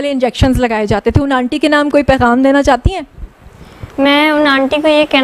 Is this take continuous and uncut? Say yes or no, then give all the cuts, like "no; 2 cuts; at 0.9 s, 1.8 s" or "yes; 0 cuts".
yes; 0 cuts